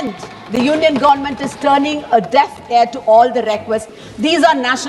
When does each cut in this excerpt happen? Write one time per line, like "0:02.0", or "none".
0:04.0